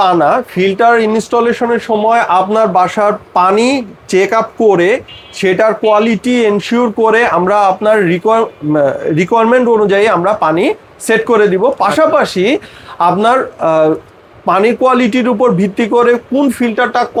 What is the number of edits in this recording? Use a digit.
0